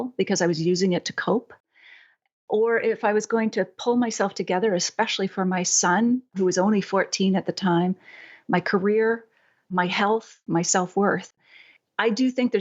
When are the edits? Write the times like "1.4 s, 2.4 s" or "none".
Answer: 10.3 s, 11.4 s